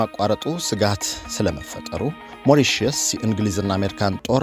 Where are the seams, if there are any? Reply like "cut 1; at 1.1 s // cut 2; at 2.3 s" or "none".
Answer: cut 1; at 2.3 s